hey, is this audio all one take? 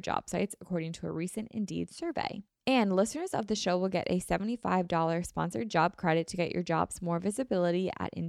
no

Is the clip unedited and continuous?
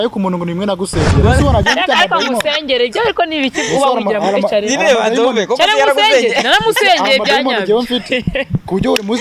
no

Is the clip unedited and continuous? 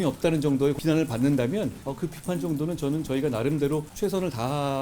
no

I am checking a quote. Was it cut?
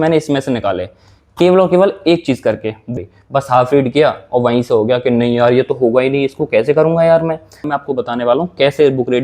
yes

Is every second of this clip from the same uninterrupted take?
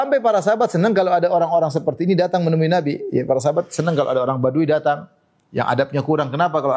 yes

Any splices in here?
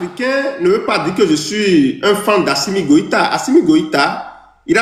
no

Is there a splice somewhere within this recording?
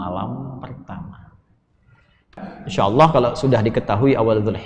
yes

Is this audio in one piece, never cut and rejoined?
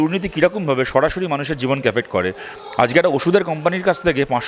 yes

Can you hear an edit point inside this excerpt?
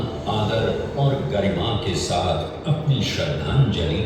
no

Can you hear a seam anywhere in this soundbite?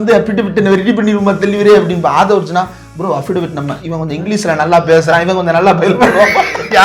no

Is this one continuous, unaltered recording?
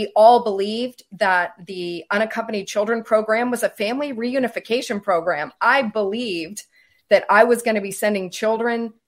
yes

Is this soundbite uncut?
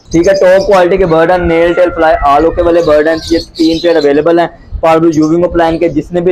yes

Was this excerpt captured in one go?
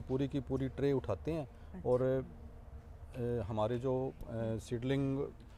yes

